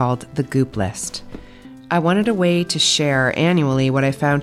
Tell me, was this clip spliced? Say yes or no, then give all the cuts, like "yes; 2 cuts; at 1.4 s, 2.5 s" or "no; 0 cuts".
no; 0 cuts